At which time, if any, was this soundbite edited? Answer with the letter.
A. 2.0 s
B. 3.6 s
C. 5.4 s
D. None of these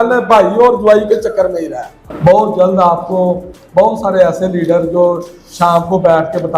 A